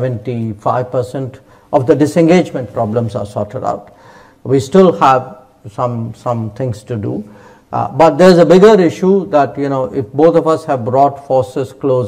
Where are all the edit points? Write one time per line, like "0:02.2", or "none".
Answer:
none